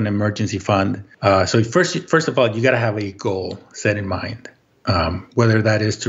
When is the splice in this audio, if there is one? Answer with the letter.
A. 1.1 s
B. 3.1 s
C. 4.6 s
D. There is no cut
A